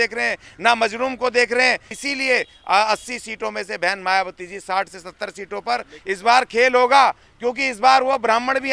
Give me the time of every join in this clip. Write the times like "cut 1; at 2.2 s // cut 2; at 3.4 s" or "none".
cut 1; at 2.0 s

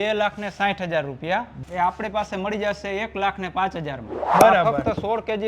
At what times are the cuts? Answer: cut 1; at 1.6 s // cut 2; at 4.3 s

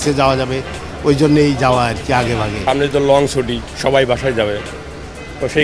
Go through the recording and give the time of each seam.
cut 1; at 2.5 s

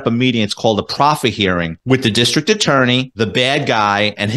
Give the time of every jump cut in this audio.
cut 1; at 1.7 s // cut 2; at 3.1 s

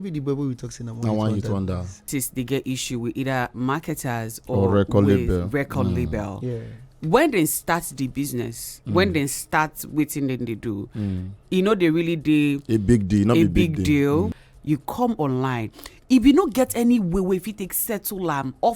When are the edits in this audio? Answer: cut 1; at 2.1 s // cut 2; at 14.4 s

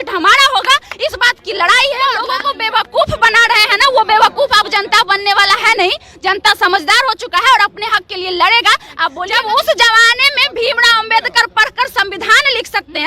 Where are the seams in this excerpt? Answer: cut 1; at 2.2 s // cut 2; at 9.2 s

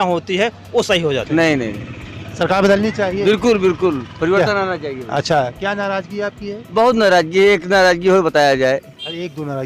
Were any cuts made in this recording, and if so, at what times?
cut 1; at 1.3 s

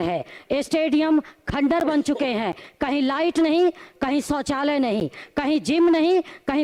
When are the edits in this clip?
none

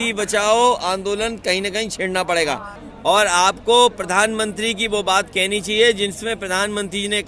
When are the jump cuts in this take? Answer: cut 1; at 2.8 s

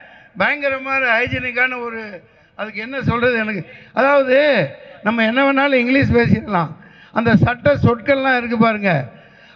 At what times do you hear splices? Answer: none

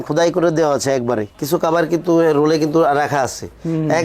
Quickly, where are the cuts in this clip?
cut 1; at 1.3 s

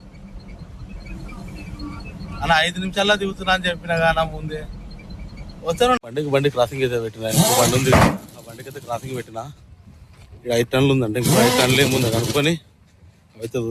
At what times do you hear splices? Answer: cut 1; at 6.0 s

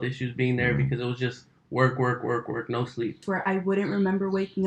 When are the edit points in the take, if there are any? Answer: cut 1; at 3.2 s

